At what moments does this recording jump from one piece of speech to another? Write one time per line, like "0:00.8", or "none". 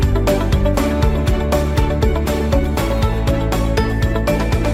none